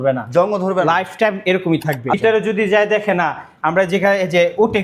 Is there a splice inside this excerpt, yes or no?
yes